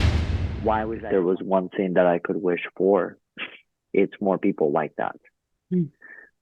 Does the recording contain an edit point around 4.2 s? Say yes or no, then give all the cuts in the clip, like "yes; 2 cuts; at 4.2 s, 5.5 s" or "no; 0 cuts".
no; 1 cut; at 1.0 s